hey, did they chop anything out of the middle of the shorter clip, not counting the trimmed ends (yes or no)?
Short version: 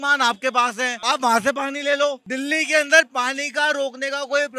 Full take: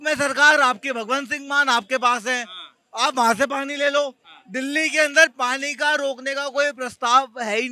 yes